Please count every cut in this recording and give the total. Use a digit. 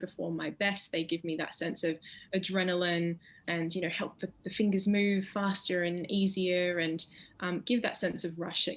1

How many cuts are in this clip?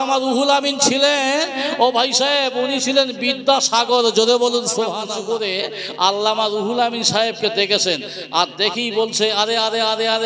1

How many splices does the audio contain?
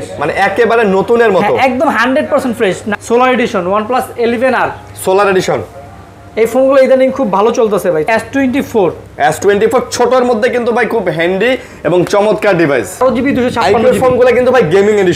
3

